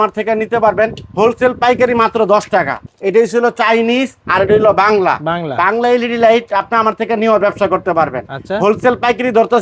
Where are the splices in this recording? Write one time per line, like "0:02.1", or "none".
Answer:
none